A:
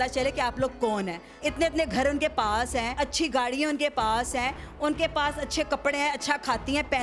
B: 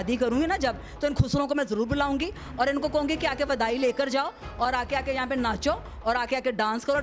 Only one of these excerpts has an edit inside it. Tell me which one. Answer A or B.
A